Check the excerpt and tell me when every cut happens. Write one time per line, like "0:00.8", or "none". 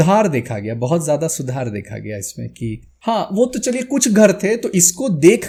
none